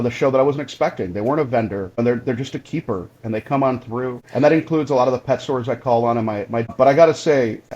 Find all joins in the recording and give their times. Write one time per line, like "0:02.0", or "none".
0:02.0
0:04.2
0:06.7